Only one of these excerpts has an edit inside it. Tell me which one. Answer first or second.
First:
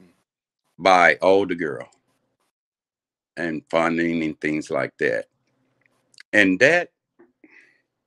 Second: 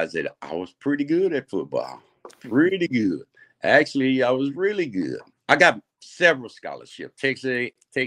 second